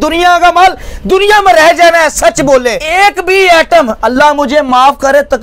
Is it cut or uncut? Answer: cut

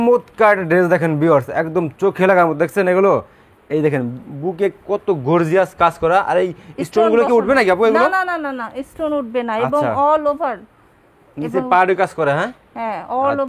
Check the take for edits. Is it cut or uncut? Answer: uncut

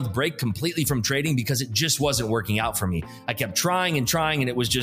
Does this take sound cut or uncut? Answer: uncut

